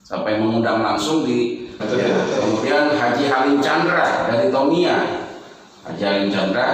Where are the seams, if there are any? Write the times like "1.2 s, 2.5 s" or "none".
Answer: 1.8 s